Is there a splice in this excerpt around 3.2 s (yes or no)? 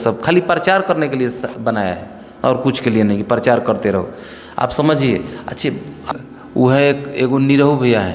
no